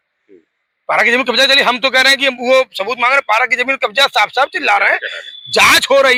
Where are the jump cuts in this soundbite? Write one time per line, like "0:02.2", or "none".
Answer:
none